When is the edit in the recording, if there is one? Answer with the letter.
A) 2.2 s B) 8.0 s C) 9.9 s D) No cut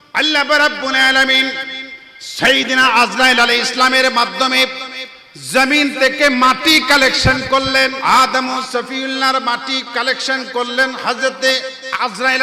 B